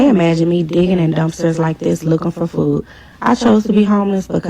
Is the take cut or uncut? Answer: cut